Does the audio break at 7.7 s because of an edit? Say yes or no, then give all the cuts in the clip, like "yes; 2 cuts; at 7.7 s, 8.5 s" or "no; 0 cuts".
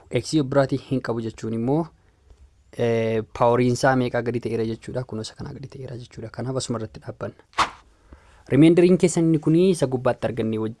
yes; 1 cut; at 7.7 s